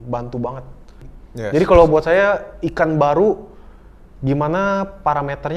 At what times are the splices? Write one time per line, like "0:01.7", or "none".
0:01.1

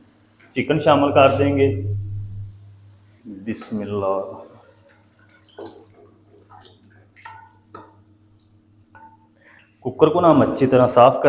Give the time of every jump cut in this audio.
none

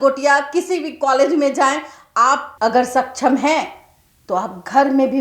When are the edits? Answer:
0:02.5

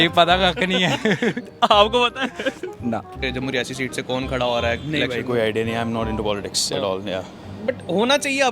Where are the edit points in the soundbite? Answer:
0:03.2

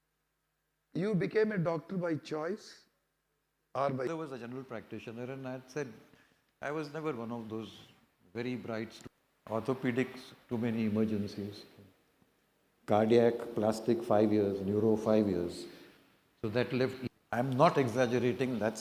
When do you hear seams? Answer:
0:04.1
0:09.0
0:17.0

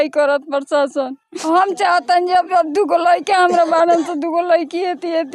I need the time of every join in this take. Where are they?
0:01.3

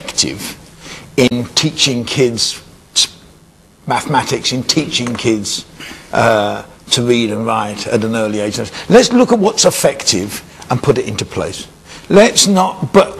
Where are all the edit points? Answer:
0:06.8

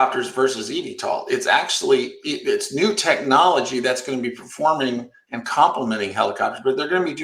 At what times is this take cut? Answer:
none

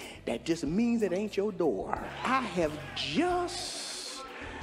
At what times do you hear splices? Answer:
0:02.1

